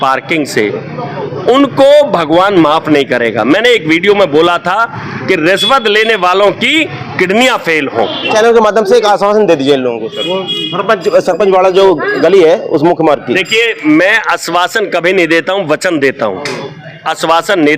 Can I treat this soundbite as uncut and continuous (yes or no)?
no